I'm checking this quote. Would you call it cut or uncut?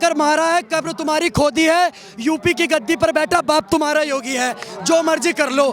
uncut